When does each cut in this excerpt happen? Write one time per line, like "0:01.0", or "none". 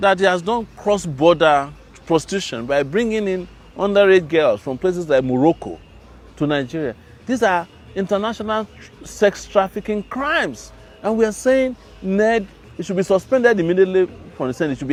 none